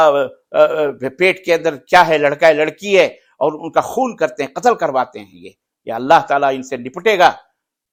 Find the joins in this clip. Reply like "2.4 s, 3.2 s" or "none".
none